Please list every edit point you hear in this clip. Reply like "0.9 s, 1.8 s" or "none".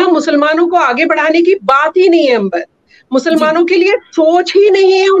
none